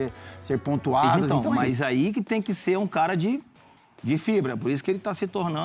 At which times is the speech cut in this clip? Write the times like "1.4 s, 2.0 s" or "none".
1.3 s